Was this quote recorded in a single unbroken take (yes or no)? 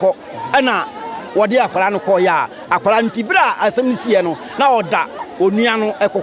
yes